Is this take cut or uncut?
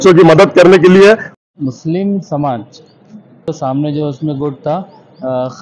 cut